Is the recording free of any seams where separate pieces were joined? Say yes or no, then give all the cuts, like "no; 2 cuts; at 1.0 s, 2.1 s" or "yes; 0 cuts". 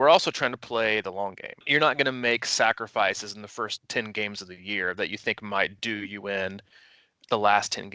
no; 2 cuts; at 1.6 s, 3.8 s